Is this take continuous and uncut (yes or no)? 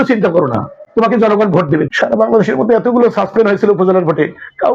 no